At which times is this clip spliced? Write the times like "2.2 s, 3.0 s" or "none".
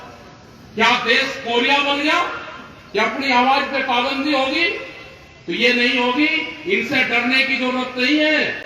none